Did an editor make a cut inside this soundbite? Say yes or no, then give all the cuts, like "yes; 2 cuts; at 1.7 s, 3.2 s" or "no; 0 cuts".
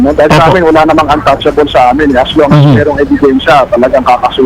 no; 0 cuts